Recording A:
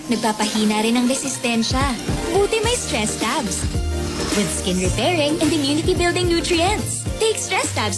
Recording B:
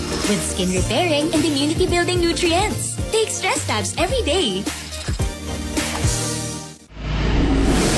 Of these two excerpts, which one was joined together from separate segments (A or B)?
B